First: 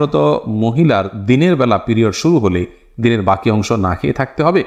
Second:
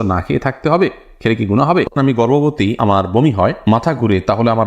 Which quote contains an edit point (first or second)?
second